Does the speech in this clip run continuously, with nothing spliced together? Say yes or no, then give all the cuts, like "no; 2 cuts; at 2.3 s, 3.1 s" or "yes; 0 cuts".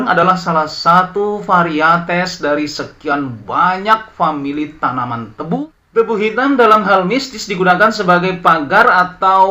no; 1 cut; at 5.6 s